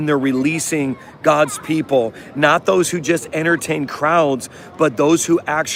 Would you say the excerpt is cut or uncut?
uncut